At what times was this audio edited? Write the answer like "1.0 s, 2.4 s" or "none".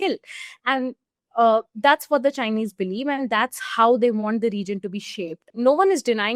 5.4 s

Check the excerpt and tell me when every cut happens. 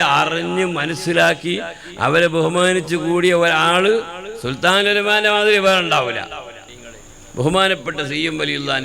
6.6 s

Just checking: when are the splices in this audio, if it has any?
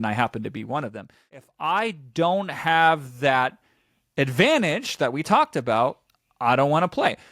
1.5 s

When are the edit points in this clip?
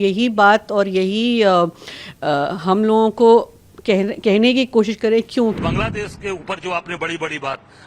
5.6 s

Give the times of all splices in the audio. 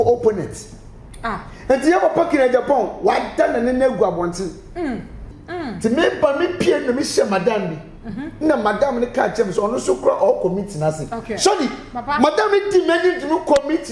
5.2 s

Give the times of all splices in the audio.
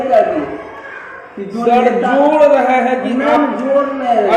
none

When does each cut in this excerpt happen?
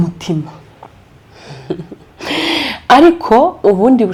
none

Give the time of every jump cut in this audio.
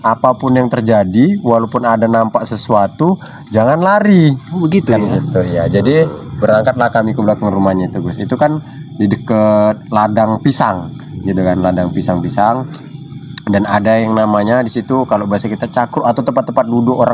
none

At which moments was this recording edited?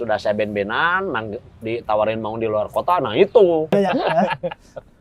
4.0 s

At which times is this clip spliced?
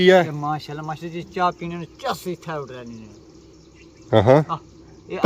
none

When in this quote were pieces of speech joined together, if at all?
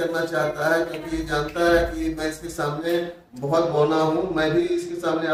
none

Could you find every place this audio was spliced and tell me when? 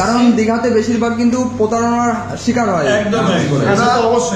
none

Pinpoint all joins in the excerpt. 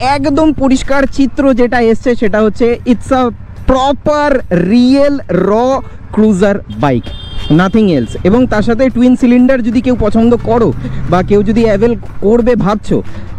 none

